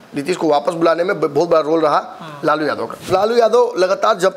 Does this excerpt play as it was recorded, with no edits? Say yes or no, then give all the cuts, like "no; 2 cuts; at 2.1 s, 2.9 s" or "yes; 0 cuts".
no; 1 cut; at 3.1 s